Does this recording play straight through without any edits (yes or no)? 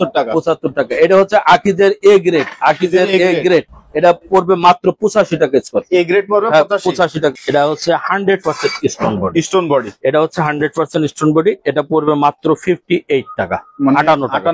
no